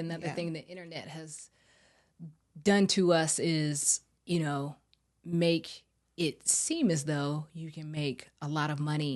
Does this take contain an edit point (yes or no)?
no